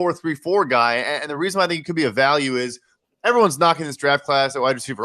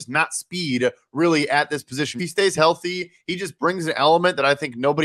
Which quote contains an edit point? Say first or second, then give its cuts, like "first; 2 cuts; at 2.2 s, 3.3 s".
second; 1 cut; at 2.2 s